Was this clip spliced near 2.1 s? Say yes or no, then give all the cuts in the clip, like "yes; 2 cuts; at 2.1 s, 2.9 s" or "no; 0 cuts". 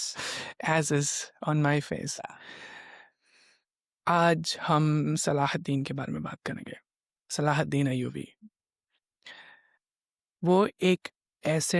no; 0 cuts